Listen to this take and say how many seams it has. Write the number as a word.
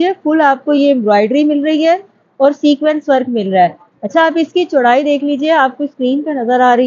zero